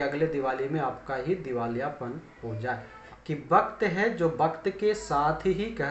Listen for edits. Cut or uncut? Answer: cut